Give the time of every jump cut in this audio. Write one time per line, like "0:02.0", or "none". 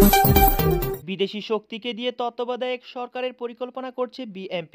none

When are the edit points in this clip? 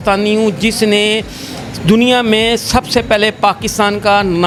none

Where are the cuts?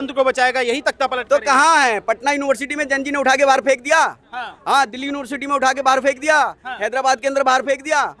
none

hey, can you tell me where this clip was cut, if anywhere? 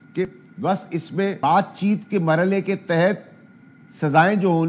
0:01.4

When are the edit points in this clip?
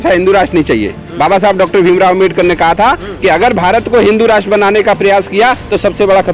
none

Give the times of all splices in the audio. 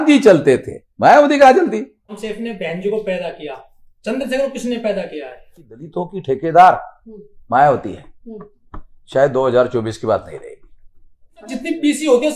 0:02.2
0:05.8
0:11.5

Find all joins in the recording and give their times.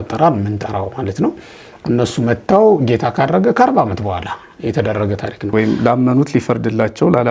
0:05.5

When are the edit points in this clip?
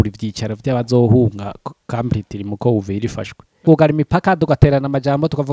0:03.6

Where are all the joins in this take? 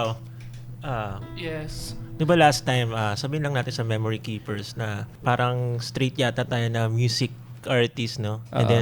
0:05.0
0:07.6

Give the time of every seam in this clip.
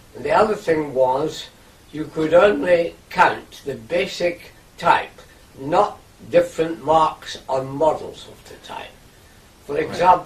0:01.8

